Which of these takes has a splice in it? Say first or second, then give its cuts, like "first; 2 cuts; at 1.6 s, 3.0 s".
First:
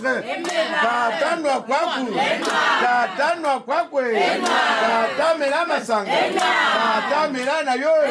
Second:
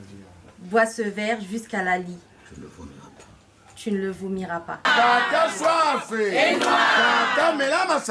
second; 1 cut; at 4.8 s